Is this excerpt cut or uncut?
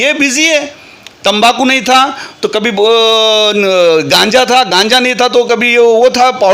uncut